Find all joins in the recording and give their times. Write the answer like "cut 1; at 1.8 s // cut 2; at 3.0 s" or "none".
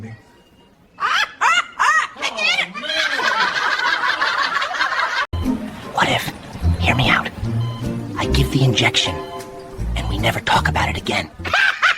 none

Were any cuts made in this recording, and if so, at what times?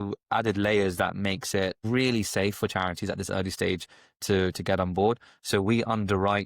cut 1; at 1.8 s

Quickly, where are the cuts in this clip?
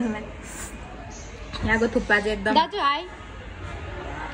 none

